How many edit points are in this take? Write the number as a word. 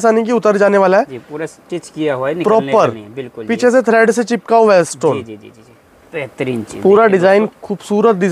zero